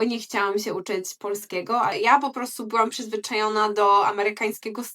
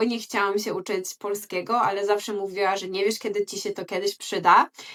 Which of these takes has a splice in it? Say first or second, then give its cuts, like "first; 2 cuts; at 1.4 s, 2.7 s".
first; 1 cut; at 1.9 s